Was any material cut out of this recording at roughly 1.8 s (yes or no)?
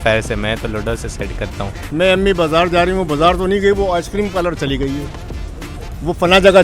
yes